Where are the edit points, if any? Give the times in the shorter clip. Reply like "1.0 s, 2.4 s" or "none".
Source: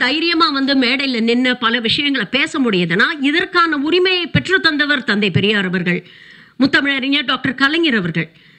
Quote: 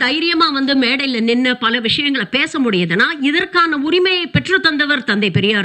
none

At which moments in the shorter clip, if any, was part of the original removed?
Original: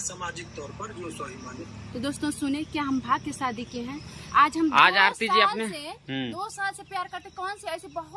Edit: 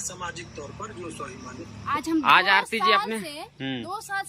2.0 s

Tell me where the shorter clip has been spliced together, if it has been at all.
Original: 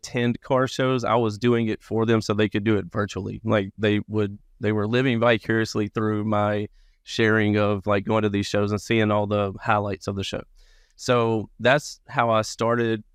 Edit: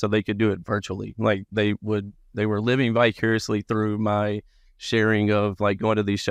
none

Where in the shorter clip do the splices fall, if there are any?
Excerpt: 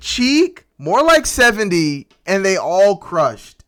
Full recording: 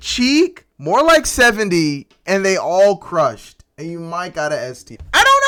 none

